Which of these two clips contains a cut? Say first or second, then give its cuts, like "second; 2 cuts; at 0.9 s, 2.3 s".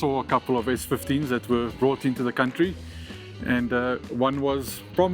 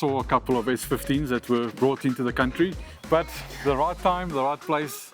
second; 1 cut; at 2.9 s